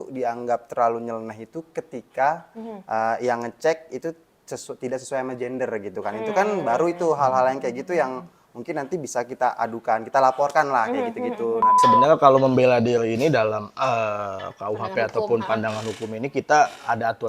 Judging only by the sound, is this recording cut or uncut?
cut